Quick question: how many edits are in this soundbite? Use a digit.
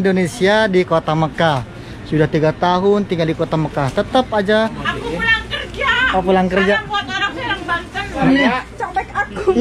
2